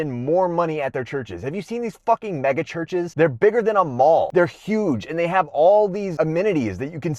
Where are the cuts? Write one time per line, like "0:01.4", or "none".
0:03.1
0:04.3
0:06.1